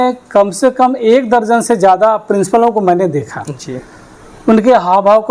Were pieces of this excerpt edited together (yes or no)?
no